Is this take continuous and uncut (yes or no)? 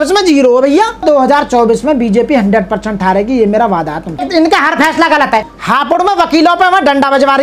no